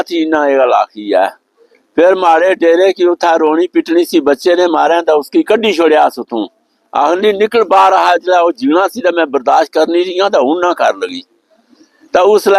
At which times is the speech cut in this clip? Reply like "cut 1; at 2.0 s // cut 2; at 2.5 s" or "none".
none